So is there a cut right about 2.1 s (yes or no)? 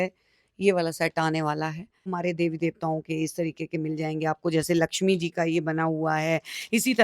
yes